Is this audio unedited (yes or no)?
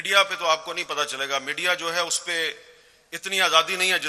yes